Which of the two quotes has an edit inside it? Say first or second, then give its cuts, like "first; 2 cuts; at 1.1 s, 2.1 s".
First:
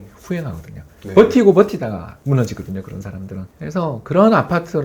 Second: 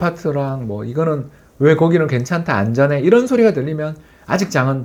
first; 2 cuts; at 2.1 s, 3.4 s